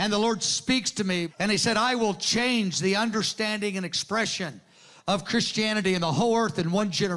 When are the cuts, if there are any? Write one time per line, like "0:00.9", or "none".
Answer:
0:01.3